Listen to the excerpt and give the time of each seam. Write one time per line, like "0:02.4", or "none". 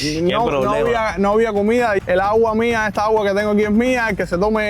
0:02.0